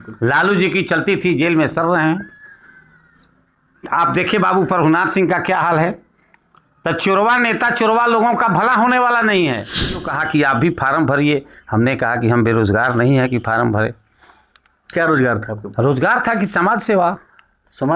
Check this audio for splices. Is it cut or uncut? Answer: cut